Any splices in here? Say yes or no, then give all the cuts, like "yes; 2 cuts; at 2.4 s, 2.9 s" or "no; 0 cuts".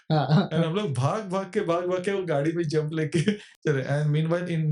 no; 0 cuts